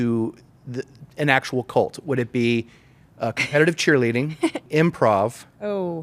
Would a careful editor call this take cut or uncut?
cut